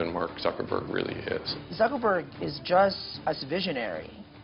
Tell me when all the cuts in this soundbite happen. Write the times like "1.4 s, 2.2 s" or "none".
1.5 s, 3.1 s